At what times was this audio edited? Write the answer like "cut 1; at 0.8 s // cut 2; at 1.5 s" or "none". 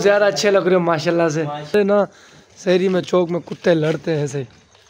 cut 1; at 1.7 s